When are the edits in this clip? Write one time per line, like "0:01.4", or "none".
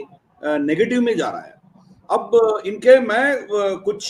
none

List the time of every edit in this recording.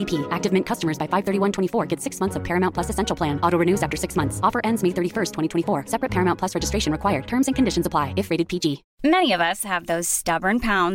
0:08.9

